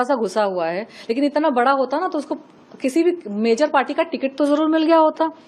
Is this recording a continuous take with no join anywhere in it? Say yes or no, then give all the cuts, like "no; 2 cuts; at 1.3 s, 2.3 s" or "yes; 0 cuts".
yes; 0 cuts